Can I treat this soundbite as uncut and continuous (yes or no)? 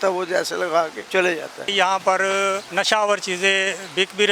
no